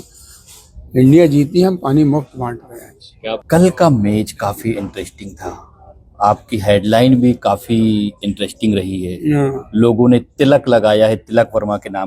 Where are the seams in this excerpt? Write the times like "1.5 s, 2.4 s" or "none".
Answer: 3.4 s

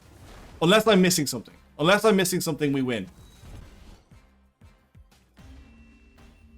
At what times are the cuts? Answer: 3.6 s

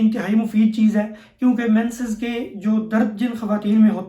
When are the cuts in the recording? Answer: none

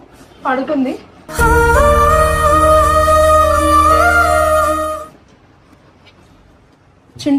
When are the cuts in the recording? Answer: none

